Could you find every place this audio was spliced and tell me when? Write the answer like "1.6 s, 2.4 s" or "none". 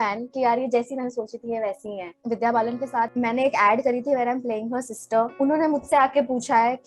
2.1 s, 3.1 s, 5.3 s